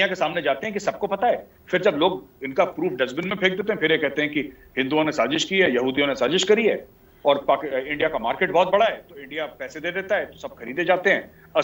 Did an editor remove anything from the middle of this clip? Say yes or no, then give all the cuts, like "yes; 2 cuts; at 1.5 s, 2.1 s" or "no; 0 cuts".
no; 0 cuts